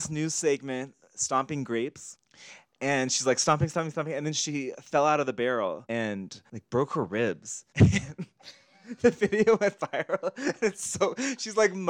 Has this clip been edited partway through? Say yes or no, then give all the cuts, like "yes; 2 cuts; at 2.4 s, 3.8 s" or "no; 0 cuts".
no; 0 cuts